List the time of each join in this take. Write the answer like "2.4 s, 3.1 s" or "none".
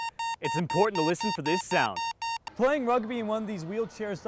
2.4 s